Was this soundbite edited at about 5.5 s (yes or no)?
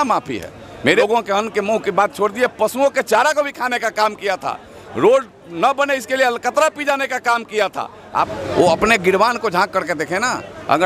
no